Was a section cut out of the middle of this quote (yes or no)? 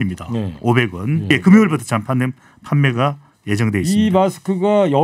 yes